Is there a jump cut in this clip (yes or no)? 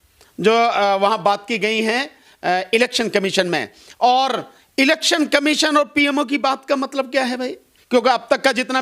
yes